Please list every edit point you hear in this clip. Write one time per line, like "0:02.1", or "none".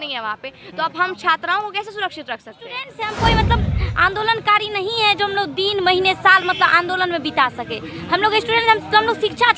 0:02.9